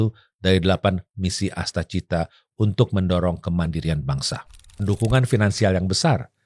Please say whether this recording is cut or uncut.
cut